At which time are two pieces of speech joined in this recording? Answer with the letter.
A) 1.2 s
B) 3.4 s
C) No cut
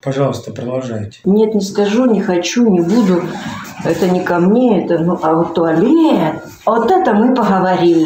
A